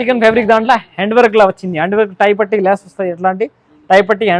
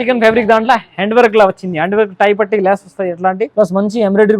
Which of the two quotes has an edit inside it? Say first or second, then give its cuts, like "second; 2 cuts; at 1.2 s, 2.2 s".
second; 1 cut; at 3.4 s